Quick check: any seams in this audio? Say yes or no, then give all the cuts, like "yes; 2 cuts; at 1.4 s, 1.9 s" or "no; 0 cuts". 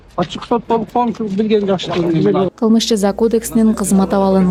no; 0 cuts